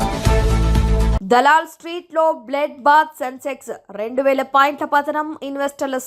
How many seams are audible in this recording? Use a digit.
1